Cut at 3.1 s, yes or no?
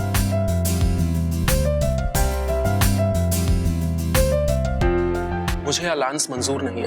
no